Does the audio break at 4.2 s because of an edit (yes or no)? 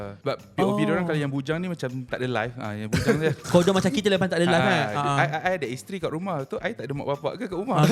no